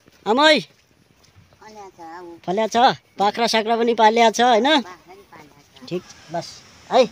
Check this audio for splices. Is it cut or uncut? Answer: cut